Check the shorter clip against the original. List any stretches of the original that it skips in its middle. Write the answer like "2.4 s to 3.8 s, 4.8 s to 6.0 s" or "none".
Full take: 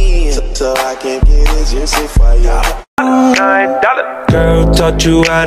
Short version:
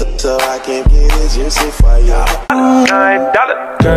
2.8 s to 2.9 s